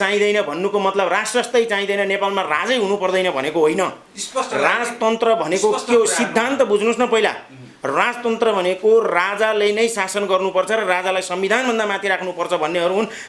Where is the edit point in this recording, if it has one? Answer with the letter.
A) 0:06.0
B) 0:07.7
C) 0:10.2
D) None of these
D